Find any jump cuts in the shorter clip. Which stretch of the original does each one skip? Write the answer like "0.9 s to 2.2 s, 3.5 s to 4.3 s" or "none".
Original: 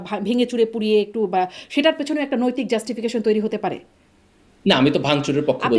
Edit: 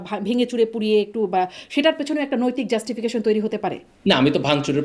3.9 s to 4.5 s

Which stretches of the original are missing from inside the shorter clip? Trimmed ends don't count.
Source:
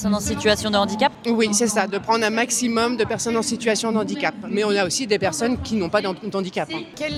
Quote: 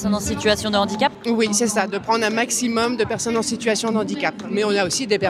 none

